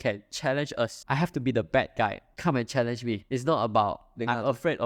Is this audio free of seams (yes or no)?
no